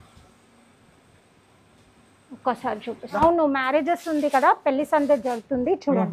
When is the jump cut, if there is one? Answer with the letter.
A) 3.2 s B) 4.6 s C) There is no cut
A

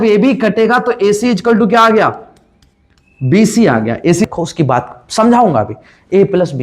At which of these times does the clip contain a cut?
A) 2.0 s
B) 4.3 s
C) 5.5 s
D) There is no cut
B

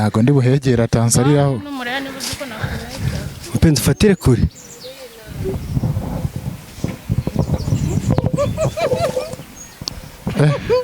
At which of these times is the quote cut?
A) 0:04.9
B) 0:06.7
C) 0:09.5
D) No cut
D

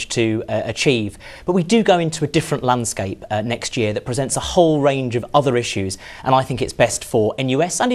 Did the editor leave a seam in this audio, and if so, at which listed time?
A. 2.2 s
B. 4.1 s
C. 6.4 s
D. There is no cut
D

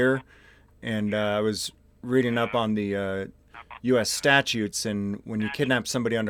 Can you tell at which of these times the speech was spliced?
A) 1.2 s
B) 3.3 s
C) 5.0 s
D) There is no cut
D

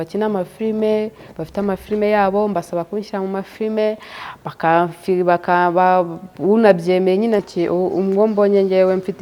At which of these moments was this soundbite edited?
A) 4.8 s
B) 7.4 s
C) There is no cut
B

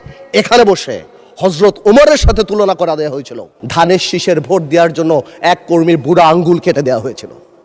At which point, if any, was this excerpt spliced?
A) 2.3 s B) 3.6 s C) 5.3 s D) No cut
B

